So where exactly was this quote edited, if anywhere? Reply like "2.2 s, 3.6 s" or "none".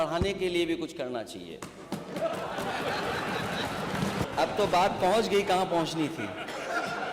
4.3 s